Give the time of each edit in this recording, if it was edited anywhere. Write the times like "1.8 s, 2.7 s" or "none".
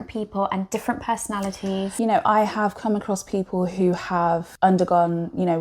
1.9 s, 4.5 s